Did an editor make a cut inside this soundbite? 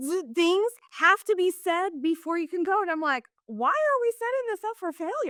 no; 0 cuts

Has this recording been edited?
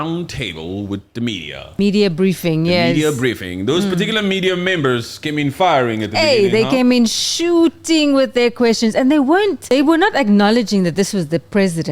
yes; 2 cuts; at 1.8 s, 9.6 s

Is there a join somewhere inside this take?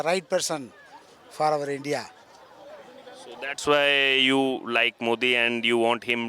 no; 0 cuts

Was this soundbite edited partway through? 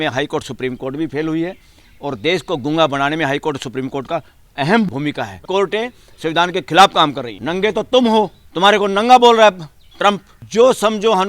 yes; 4 cuts; at 5.5 s, 7.3 s, 8.4 s, 10.3 s

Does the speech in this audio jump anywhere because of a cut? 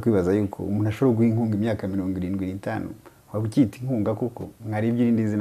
no; 0 cuts

